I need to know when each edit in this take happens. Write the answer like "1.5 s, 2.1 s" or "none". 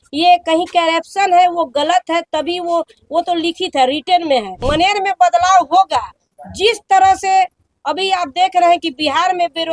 4.6 s